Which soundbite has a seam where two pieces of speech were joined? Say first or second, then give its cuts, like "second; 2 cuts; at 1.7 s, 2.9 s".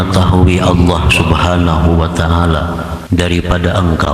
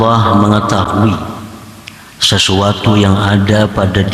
first; 1 cut; at 2.9 s